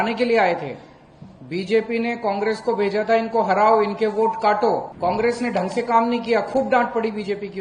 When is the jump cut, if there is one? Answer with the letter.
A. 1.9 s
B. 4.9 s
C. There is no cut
B